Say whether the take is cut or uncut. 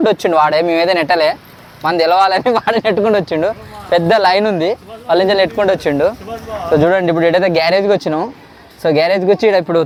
uncut